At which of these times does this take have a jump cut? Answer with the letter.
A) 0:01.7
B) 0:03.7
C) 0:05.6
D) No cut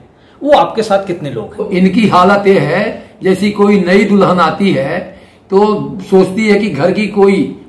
A